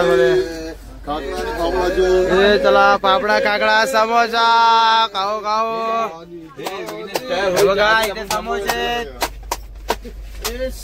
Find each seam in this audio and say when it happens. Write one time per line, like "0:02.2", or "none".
none